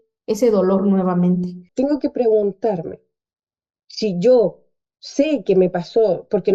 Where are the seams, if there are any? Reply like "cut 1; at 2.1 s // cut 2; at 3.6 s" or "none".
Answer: cut 1; at 1.6 s

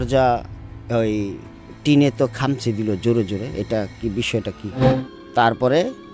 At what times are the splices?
cut 1; at 4.9 s

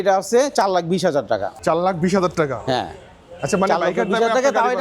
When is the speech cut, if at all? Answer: cut 1; at 1.5 s

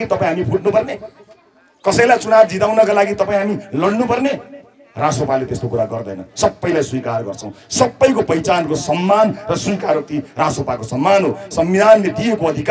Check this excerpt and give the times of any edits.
none

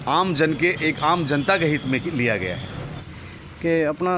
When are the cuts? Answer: cut 1; at 3.1 s

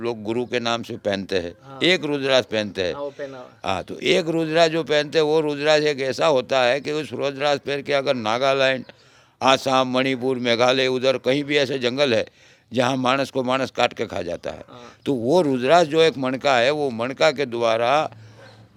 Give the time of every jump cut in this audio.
none

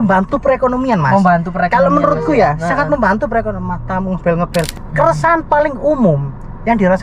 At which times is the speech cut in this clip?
cut 1; at 4.7 s

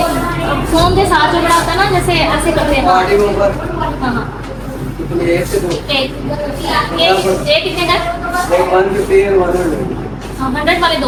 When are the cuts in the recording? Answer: none

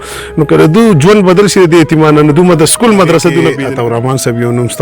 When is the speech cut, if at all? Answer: cut 1; at 3.6 s

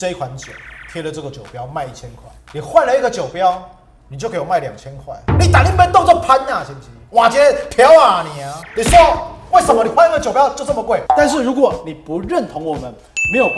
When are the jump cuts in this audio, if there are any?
cut 1; at 11.0 s

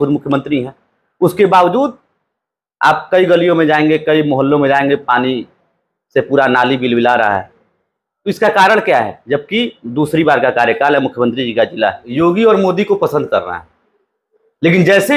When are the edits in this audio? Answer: cut 1; at 12.0 s

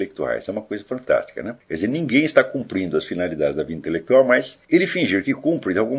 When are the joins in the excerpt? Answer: cut 1; at 1.6 s // cut 2; at 4.5 s

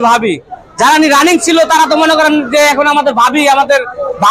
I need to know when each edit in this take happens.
none

